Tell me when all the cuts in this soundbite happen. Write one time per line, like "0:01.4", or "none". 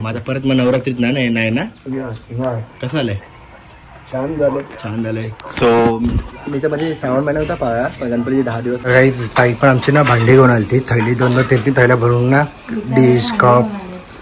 0:08.9